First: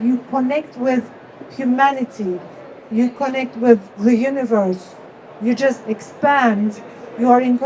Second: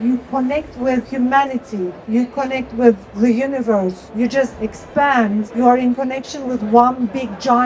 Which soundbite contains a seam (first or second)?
second